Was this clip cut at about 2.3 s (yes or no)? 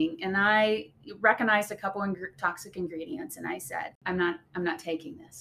no